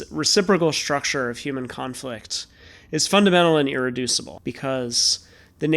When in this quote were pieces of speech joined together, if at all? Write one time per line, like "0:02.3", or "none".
0:04.3